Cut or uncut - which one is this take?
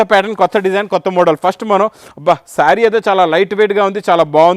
uncut